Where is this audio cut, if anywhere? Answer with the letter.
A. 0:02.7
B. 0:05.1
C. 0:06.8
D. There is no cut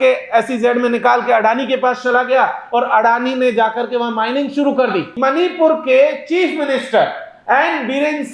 B